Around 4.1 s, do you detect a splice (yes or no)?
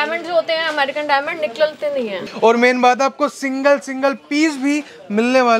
no